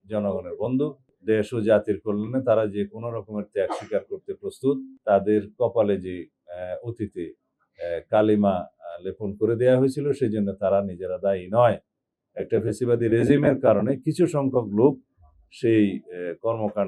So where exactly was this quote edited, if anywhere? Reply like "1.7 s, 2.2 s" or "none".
1.1 s, 4.9 s